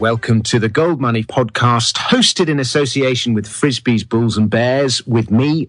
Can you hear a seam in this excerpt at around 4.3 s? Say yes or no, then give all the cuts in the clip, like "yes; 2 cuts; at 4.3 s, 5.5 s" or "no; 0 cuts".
yes; 1 cut; at 4.3 s